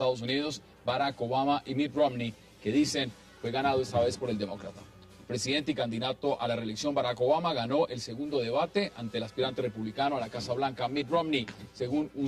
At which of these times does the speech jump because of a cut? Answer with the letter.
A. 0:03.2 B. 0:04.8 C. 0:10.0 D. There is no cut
A